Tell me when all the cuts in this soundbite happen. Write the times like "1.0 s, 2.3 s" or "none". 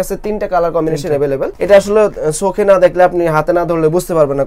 1.5 s